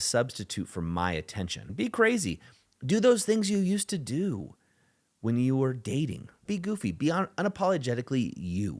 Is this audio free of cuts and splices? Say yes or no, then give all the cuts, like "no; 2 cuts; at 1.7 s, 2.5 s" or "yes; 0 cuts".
no; 2 cuts; at 1.6 s, 6.4 s